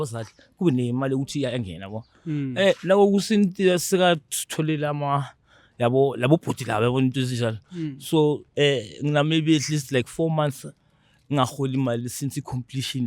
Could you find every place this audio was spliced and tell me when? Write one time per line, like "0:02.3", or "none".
0:08.5